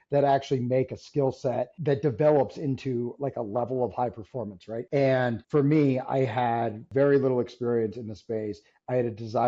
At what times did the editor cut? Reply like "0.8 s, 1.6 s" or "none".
1.7 s, 4.7 s, 5.4 s, 6.8 s